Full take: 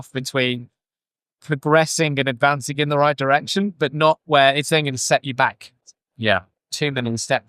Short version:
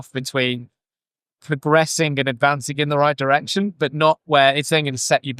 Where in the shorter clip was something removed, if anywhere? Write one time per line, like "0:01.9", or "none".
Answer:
none